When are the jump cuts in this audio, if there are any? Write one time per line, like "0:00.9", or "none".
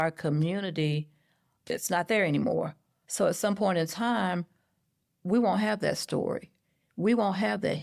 0:01.6